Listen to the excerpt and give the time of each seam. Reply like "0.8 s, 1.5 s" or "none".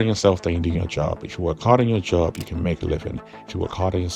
none